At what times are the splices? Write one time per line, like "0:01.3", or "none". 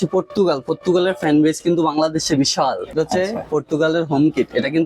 none